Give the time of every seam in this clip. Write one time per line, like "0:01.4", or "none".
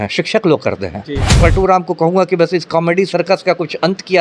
0:01.4